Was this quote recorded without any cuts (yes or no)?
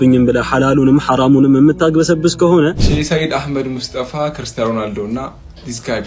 no